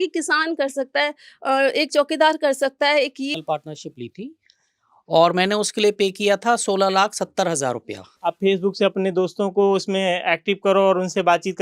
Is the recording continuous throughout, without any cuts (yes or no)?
no